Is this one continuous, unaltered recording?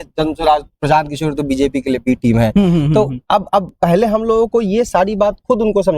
yes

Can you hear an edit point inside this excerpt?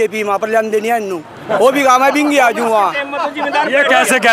no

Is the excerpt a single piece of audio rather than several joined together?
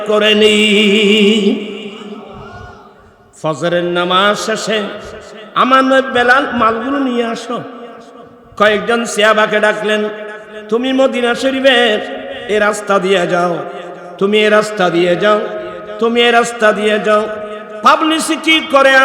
yes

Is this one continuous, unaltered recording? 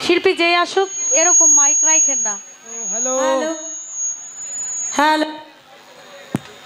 no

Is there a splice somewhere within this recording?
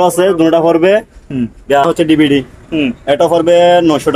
yes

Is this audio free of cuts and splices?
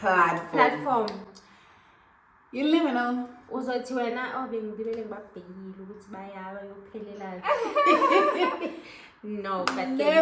yes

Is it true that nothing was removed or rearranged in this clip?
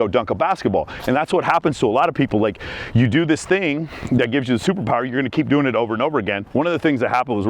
no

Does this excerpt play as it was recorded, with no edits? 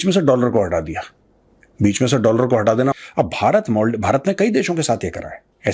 no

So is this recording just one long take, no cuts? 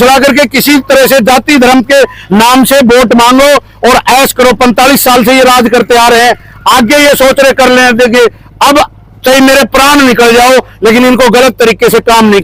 yes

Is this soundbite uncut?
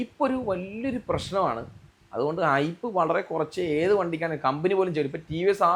yes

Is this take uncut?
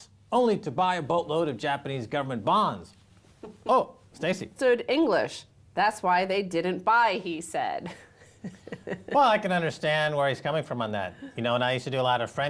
yes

